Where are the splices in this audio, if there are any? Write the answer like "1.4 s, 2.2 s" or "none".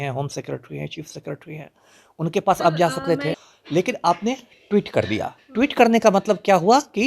3.5 s